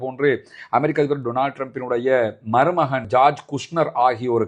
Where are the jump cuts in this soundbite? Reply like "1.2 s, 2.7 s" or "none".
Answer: none